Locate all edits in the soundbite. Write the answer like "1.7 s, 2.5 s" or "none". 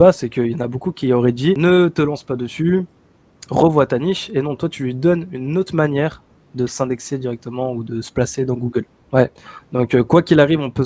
9.0 s